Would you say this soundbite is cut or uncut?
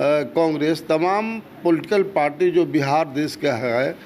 uncut